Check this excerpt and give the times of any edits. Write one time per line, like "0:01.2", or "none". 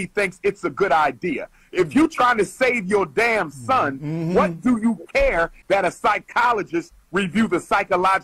0:05.6